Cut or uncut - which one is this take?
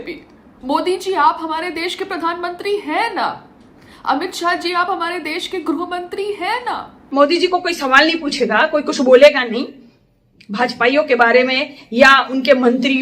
cut